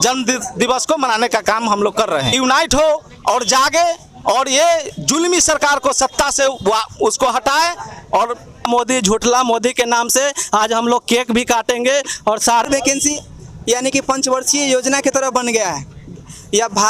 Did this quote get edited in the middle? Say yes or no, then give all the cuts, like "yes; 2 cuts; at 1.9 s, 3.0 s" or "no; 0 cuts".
yes; 3 cuts; at 2.3 s, 8.7 s, 12.7 s